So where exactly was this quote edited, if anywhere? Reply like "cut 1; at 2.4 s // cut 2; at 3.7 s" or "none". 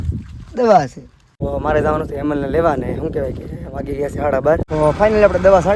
cut 1; at 1.4 s // cut 2; at 4.6 s